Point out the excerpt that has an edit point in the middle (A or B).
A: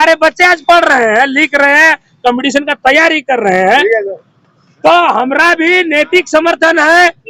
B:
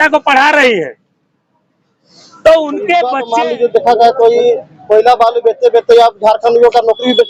B